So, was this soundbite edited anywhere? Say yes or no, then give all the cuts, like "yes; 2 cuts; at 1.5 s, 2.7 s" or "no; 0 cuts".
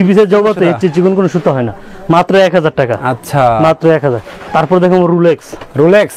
no; 0 cuts